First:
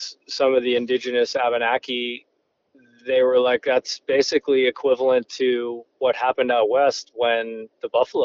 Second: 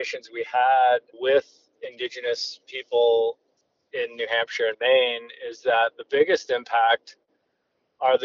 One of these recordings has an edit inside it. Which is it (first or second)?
second